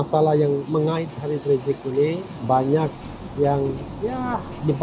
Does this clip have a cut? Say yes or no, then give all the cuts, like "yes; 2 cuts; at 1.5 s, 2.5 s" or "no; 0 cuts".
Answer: no; 0 cuts